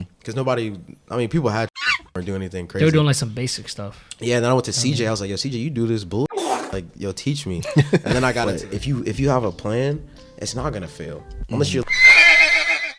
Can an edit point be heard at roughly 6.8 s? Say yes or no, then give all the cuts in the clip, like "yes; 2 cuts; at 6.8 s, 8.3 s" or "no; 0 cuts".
no; 1 cut; at 8.5 s